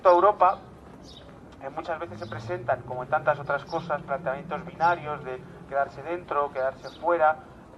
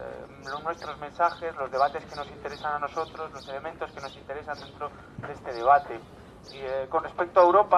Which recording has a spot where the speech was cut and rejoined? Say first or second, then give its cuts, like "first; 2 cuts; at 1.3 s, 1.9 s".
second; 1 cut; at 4.5 s